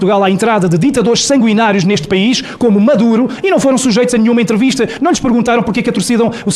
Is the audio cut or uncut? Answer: uncut